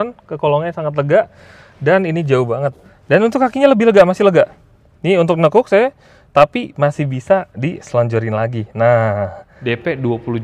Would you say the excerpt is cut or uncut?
cut